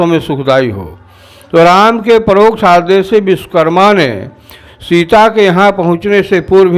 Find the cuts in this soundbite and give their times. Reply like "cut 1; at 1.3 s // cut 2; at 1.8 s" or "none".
none